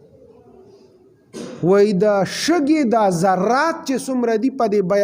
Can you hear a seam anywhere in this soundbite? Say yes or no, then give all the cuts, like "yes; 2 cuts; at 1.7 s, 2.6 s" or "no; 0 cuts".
no; 0 cuts